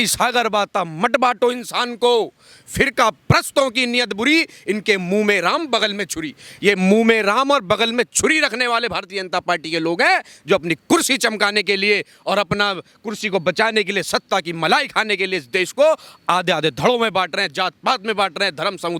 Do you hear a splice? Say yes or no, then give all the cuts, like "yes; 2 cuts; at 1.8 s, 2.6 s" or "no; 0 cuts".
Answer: no; 0 cuts